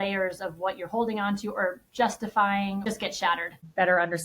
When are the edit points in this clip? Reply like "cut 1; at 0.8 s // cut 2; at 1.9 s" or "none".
cut 1; at 3.3 s